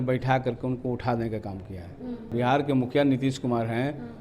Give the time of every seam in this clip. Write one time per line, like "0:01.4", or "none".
0:02.3